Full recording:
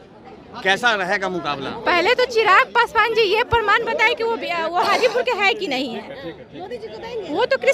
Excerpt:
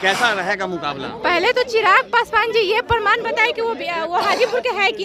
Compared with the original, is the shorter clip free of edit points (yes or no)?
yes